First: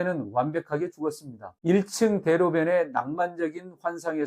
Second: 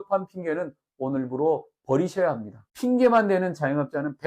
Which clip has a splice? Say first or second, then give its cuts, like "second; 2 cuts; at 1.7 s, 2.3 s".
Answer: second; 1 cut; at 2.6 s